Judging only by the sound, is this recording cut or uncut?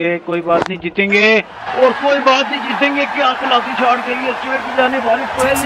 uncut